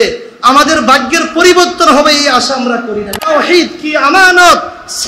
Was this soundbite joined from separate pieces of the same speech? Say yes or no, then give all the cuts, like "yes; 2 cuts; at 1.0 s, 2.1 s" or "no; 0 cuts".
yes; 1 cut; at 3.3 s